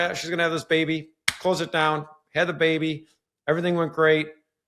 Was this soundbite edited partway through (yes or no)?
no